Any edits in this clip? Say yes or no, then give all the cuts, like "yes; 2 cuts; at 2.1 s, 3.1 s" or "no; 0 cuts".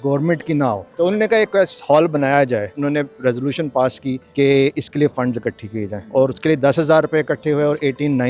yes; 4 cuts; at 0.9 s, 2.7 s, 4.2 s, 6.0 s